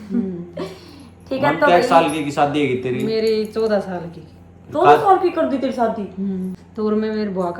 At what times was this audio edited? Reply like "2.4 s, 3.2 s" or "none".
6.5 s